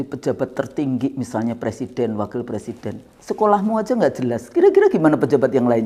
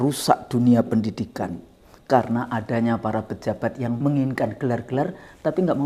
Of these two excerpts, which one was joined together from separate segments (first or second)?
second